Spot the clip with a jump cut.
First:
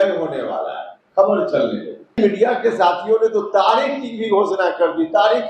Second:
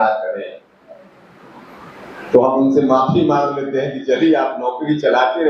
first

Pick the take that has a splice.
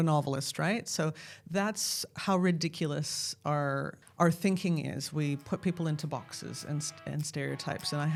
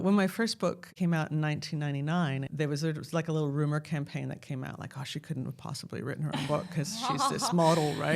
second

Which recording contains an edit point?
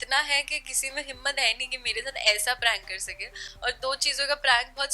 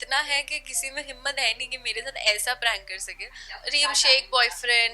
second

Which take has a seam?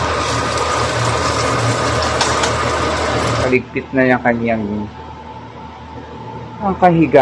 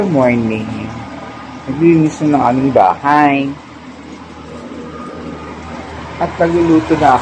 first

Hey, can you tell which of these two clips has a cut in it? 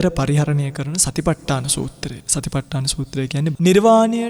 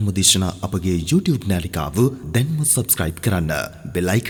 first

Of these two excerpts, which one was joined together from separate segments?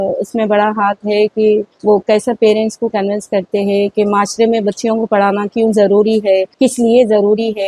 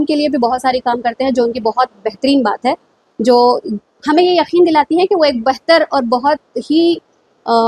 first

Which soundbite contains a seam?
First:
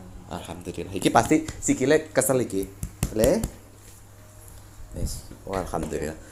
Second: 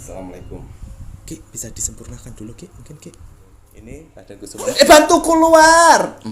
second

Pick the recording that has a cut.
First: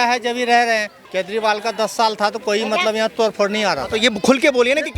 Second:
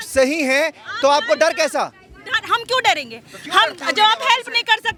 first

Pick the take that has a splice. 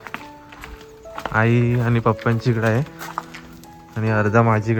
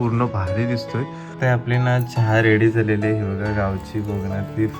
second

